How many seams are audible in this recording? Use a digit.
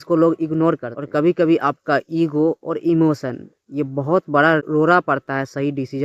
2